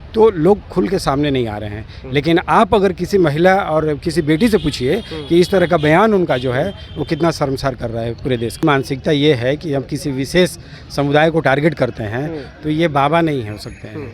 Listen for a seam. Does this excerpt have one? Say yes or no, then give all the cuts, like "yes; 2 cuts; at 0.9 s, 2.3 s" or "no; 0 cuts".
yes; 1 cut; at 8.6 s